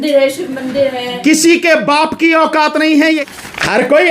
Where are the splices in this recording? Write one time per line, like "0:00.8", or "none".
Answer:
0:03.2